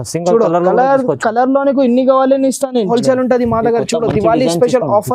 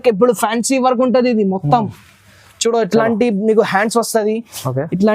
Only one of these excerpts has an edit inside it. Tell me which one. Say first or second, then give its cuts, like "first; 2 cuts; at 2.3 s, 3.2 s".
first; 1 cut; at 2.9 s